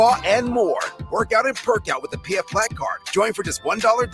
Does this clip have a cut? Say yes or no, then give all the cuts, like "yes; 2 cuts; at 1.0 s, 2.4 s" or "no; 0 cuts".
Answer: no; 0 cuts